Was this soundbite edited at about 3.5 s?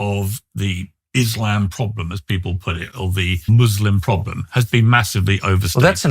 yes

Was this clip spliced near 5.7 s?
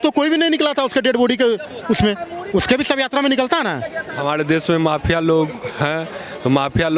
no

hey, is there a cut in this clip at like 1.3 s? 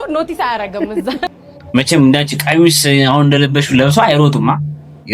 yes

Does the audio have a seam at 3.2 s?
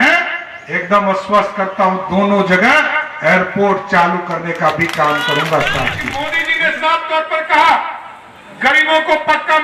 no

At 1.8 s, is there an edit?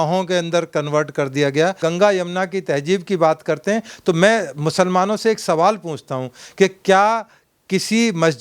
yes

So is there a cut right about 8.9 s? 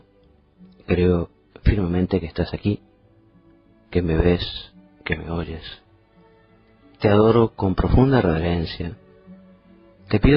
yes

